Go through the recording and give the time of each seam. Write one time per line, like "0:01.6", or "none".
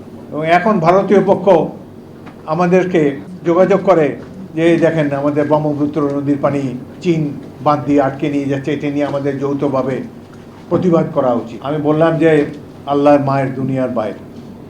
0:03.3
0:11.5